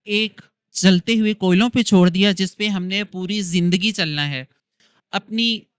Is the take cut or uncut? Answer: uncut